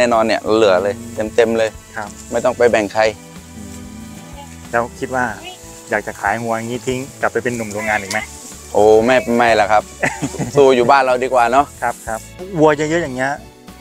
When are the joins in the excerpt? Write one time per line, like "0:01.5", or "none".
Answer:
0:12.1